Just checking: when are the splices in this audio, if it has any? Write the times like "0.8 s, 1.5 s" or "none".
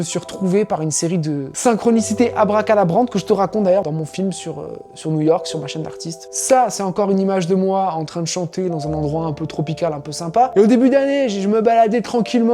1.5 s, 3.8 s